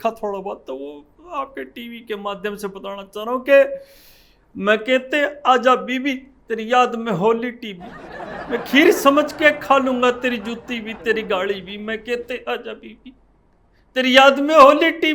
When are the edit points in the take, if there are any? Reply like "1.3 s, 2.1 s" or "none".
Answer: none